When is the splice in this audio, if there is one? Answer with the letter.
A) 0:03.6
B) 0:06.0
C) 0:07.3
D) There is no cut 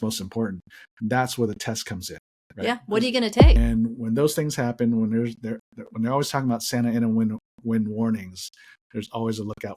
A